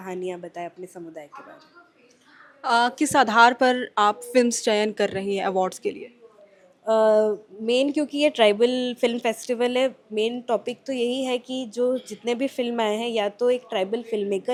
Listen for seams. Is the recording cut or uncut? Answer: uncut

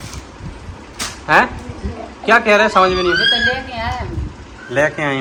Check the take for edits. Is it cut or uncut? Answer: uncut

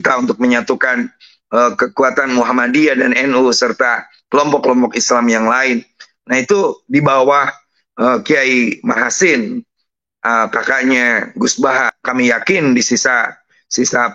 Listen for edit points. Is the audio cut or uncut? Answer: cut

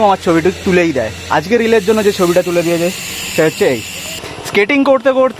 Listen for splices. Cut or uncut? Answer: cut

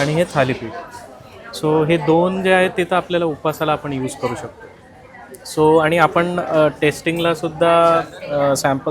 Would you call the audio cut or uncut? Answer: uncut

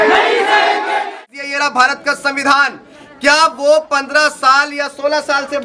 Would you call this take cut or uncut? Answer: cut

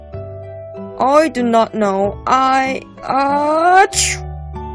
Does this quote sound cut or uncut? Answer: cut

